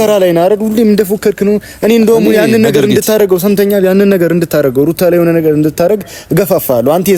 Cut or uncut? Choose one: uncut